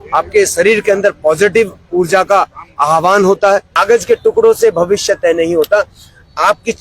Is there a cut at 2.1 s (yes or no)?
no